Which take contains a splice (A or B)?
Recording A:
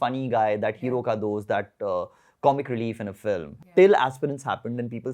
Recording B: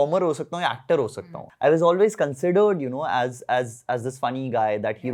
A